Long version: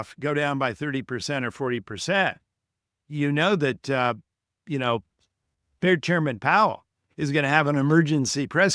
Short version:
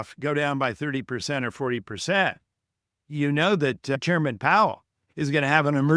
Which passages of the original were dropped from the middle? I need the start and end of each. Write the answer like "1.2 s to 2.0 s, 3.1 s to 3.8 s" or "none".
4.0 s to 6.0 s